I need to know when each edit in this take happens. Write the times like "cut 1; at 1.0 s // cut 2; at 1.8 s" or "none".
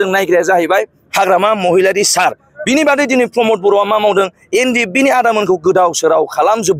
none